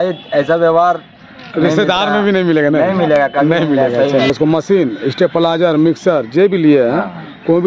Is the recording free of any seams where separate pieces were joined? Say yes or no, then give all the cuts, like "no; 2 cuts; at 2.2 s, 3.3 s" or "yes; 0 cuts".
no; 1 cut; at 4.3 s